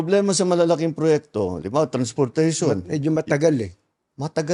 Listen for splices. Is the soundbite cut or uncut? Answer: uncut